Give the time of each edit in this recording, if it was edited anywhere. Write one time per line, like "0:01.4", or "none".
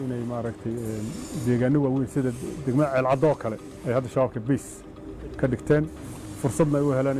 none

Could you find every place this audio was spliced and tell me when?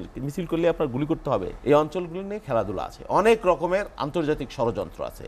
0:01.5

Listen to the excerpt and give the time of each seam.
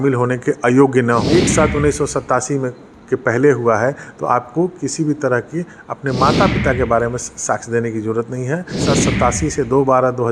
0:01.3
0:08.8

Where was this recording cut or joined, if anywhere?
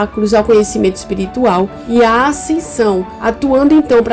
0:01.8
0:03.1

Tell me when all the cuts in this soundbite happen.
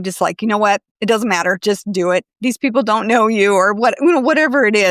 0:00.9
0:02.3

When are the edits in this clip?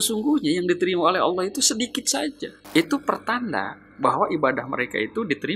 0:02.5

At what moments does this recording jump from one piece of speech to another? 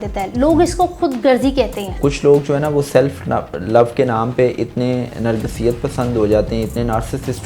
0:02.0

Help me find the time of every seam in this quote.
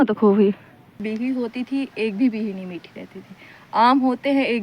0:01.0

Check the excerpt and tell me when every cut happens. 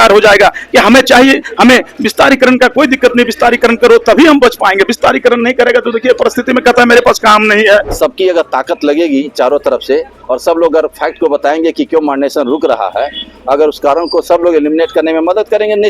0:07.9

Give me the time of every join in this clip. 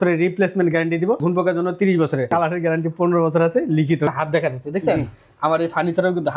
0:01.2
0:02.3
0:04.1

